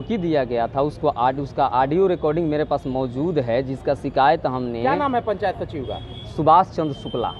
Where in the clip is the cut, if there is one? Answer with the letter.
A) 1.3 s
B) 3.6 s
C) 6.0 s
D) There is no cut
D